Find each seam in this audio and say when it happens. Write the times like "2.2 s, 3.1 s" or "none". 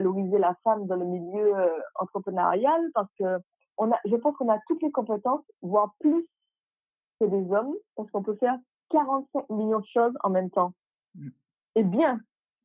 3.6 s